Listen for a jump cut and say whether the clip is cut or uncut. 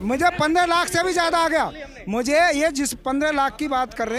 uncut